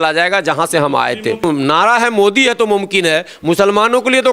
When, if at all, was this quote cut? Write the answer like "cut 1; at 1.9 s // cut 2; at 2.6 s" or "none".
cut 1; at 1.4 s